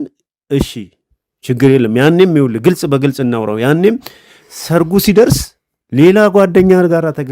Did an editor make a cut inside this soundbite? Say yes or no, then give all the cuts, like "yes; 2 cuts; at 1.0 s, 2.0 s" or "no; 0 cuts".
no; 0 cuts